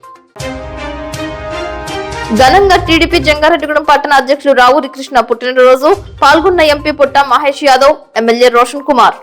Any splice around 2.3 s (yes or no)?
yes